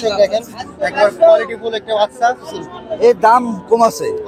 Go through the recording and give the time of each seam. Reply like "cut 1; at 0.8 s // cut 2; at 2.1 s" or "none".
cut 1; at 2.5 s